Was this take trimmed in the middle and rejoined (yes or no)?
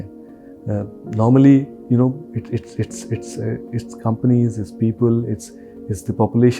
no